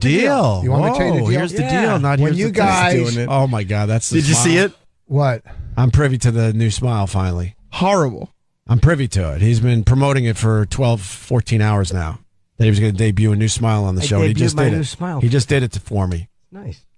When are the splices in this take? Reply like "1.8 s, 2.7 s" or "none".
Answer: 1.7 s